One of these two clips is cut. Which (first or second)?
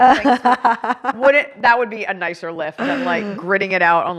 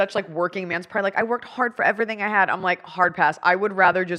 first